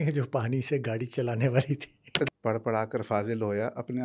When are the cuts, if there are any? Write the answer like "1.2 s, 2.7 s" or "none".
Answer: 2.3 s